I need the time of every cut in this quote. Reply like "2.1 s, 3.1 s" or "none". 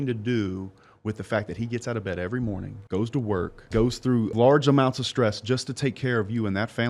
3.9 s